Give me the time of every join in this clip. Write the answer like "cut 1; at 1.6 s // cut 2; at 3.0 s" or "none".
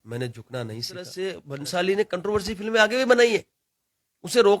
cut 1; at 1.1 s